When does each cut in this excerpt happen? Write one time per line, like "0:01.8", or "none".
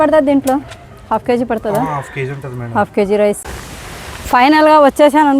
0:03.4